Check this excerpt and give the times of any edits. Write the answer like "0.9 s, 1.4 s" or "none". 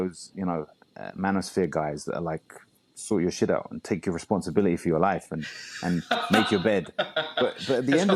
none